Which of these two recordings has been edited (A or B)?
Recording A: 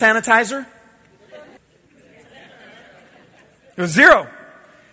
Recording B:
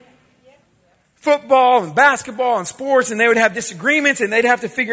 A